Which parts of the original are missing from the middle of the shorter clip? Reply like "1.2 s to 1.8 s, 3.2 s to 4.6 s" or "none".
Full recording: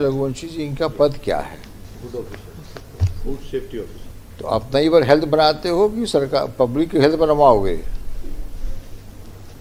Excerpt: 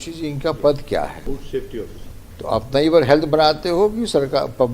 1.5 s to 3.2 s